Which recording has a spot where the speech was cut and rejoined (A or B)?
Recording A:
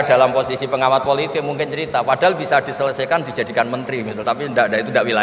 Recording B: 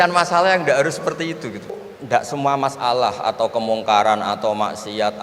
B